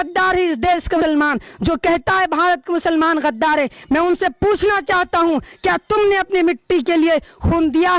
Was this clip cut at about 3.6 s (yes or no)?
no